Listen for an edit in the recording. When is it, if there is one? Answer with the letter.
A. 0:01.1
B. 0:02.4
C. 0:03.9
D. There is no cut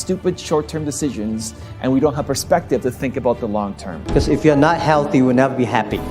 C